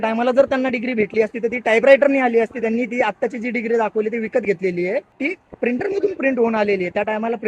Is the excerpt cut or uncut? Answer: cut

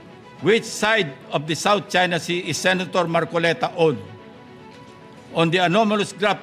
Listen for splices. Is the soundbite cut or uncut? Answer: uncut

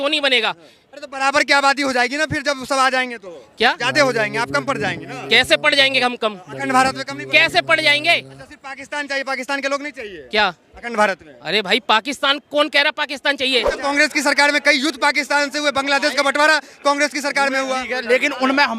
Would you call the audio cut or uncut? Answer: cut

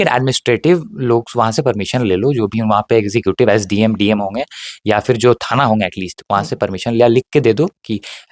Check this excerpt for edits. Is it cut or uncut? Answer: uncut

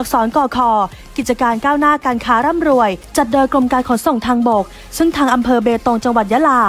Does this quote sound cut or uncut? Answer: cut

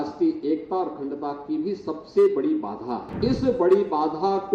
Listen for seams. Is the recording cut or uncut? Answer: cut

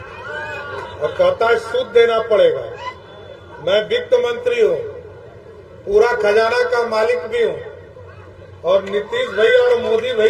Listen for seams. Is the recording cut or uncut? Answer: uncut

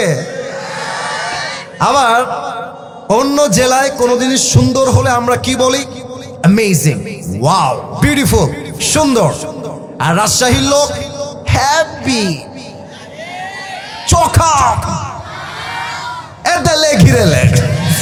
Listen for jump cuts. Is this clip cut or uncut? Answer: uncut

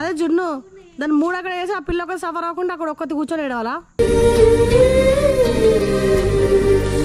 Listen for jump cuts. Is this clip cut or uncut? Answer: uncut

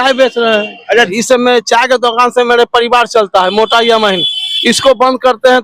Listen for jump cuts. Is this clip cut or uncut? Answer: cut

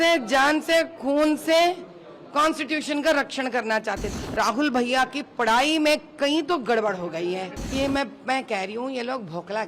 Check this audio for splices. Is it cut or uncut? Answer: cut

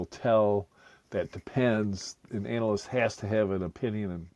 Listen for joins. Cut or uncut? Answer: uncut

